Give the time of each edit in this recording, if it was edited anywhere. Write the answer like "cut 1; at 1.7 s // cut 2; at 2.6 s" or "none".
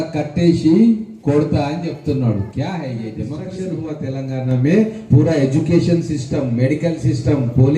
cut 1; at 3.6 s